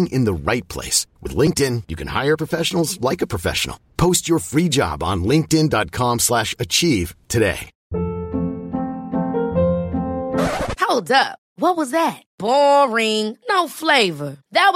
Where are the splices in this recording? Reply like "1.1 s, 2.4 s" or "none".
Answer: 7.7 s

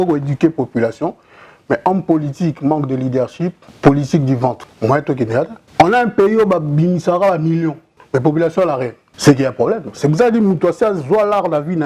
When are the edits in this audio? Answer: 3.6 s, 4.7 s, 5.6 s, 7.9 s, 9.0 s

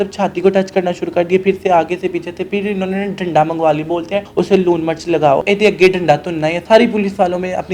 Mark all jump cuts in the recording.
4.3 s, 5.4 s, 6.6 s

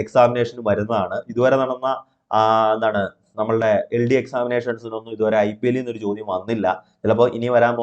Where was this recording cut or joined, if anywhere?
none

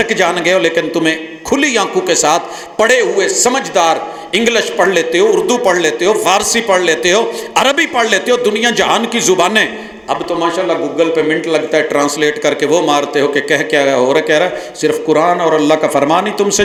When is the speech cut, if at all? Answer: none

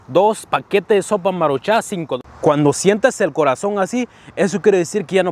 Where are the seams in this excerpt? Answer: 2.2 s

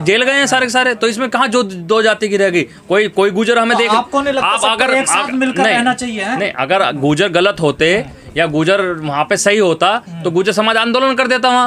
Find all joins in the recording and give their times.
none

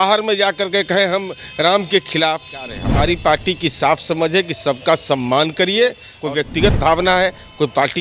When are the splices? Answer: 2.8 s, 6.1 s

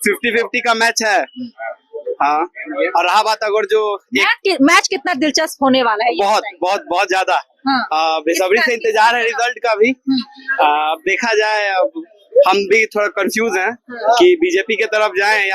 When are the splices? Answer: none

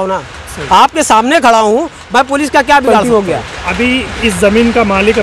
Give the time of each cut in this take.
3.0 s

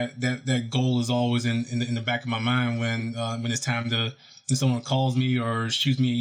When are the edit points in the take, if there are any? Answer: none

